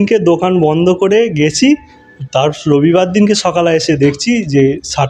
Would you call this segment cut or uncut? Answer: uncut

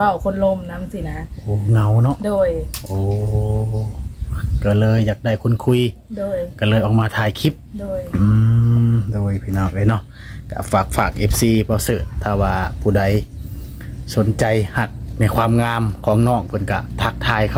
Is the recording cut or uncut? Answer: uncut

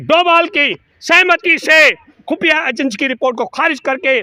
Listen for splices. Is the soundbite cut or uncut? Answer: uncut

